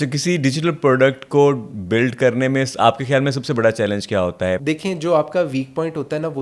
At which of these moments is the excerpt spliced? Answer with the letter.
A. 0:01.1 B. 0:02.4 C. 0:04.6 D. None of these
C